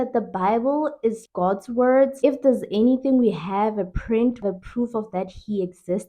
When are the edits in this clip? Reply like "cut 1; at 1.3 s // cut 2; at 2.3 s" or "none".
cut 1; at 1.2 s // cut 2; at 2.1 s // cut 3; at 4.4 s